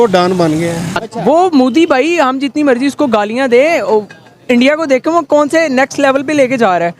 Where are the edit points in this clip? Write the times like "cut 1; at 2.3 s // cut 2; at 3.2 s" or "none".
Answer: cut 1; at 1.0 s